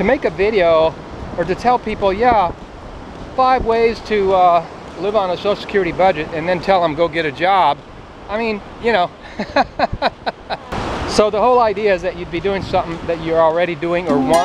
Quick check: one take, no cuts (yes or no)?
no